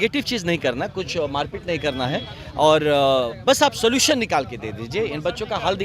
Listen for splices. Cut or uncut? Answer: uncut